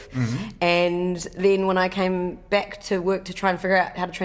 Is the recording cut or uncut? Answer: uncut